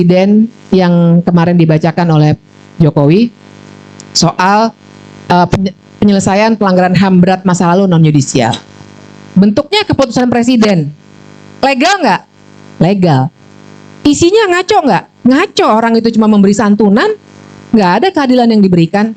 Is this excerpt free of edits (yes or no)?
yes